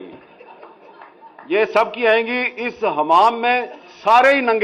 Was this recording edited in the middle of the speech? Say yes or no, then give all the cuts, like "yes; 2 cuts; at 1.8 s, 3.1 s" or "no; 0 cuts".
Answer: no; 0 cuts